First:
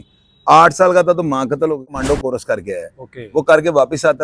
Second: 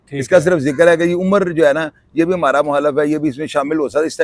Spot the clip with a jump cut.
first; 1 cut; at 1.9 s

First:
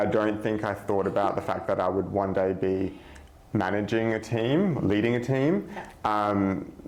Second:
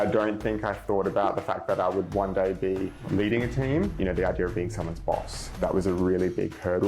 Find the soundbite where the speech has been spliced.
second; 2 cuts; at 3.0 s, 3.9 s

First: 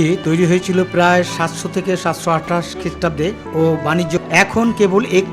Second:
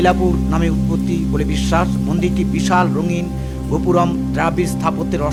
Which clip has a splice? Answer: first; 2 cuts; at 3.4 s, 4.2 s

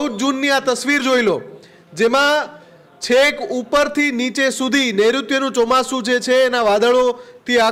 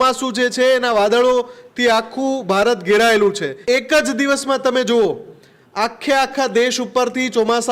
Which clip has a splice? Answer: second; 1 cut; at 3.5 s

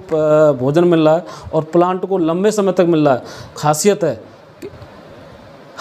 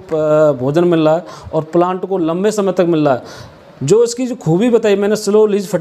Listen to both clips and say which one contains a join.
first; 1 cut; at 3.6 s

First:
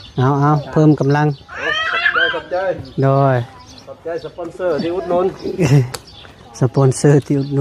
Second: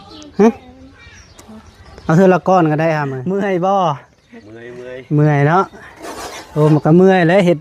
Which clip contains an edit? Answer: second; 1 cut; at 3.1 s

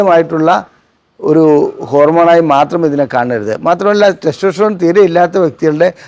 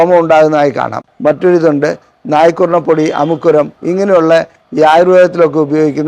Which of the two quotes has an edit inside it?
second; 1 cut; at 1.0 s

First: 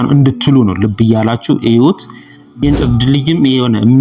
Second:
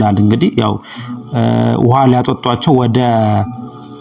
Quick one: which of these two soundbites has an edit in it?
first; 1 cut; at 2.6 s

